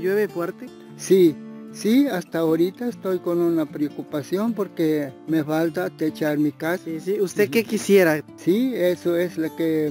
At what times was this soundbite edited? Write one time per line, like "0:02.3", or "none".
0:08.3